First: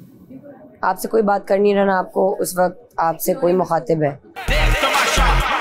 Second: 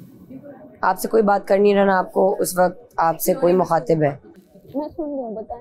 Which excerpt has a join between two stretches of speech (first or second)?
first